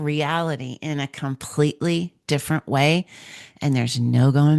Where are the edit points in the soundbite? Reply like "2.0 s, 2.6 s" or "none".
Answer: none